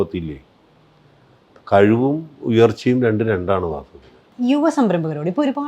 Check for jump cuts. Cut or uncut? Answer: uncut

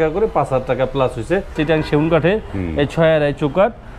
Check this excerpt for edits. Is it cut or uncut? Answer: cut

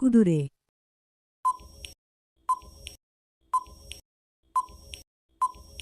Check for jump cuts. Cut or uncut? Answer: cut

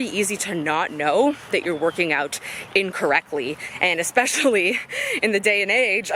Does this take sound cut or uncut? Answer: uncut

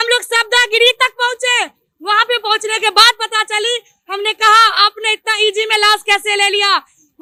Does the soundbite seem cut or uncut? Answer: uncut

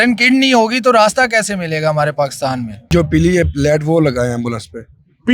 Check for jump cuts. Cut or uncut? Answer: cut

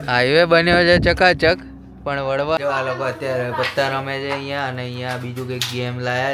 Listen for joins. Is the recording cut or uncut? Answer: cut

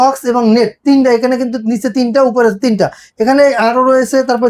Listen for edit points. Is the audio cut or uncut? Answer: uncut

